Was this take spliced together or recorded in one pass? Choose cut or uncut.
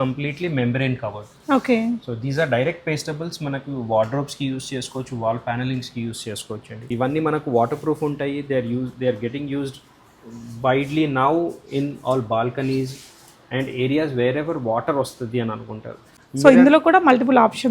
cut